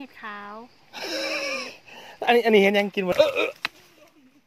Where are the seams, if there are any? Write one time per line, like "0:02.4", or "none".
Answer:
0:03.1